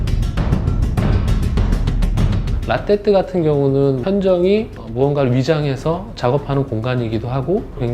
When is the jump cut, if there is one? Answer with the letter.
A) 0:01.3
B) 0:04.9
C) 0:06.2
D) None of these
B